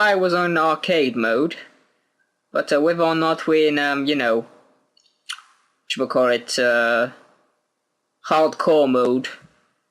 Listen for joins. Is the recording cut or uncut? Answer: cut